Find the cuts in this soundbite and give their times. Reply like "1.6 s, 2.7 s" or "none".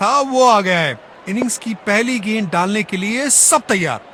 none